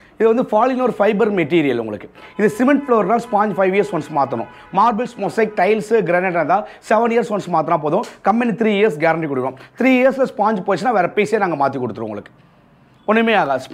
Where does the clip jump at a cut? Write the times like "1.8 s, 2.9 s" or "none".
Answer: none